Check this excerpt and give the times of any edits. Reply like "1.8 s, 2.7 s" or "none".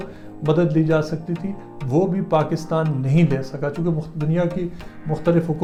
none